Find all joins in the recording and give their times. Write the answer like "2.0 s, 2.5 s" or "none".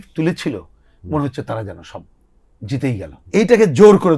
3.2 s